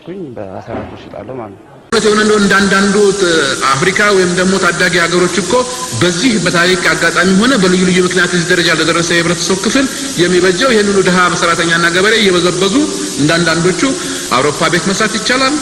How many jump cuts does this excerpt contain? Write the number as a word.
one